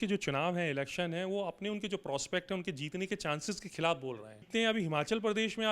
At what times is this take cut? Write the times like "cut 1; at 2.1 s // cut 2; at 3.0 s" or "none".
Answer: cut 1; at 4.4 s